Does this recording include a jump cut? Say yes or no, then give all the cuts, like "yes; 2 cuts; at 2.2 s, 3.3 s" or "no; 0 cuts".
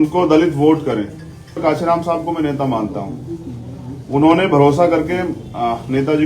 yes; 1 cut; at 1.6 s